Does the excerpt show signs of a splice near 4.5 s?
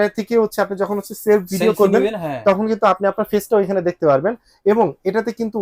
no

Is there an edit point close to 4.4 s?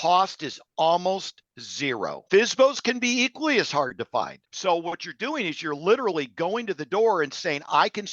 yes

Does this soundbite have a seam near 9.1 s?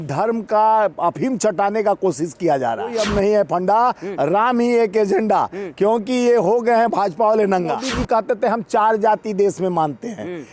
no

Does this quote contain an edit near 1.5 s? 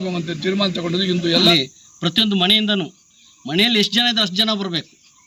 yes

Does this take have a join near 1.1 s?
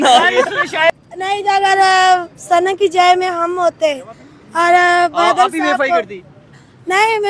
yes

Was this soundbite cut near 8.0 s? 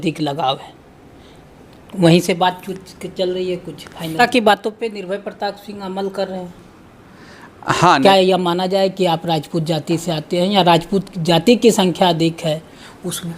yes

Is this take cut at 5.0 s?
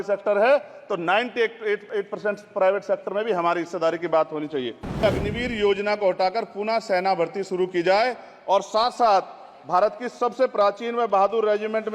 yes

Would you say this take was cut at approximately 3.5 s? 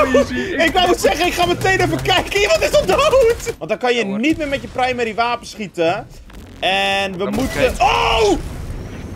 yes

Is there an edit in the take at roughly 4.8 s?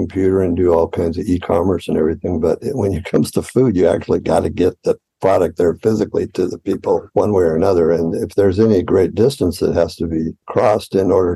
no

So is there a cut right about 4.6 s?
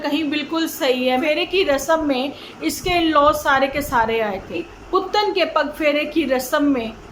yes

